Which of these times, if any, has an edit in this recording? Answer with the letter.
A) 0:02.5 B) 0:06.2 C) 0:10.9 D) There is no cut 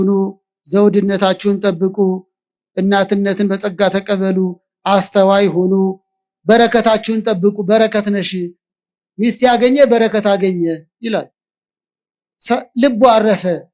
D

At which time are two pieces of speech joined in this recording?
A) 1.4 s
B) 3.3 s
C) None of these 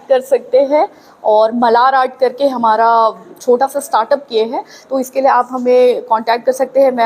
B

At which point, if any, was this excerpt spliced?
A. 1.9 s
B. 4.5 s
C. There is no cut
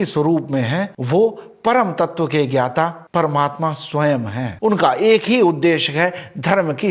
B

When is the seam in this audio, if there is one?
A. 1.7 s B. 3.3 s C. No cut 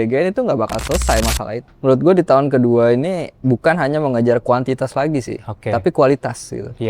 A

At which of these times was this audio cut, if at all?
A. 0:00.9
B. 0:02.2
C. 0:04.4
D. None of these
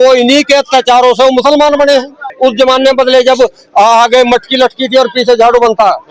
B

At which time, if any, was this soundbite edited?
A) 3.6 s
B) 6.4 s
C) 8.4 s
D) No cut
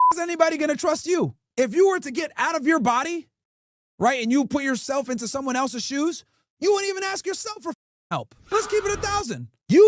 C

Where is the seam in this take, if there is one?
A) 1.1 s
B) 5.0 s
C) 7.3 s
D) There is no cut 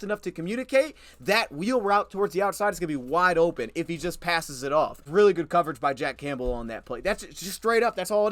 B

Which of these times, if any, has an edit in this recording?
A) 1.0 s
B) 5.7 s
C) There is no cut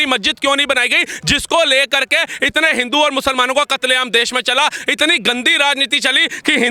C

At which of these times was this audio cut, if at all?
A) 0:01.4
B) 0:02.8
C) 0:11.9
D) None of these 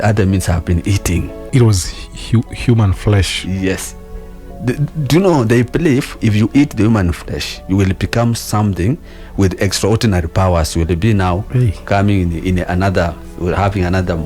A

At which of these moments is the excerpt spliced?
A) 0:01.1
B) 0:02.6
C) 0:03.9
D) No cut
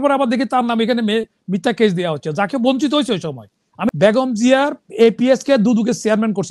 C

